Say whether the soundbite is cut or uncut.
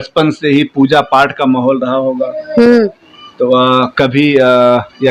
uncut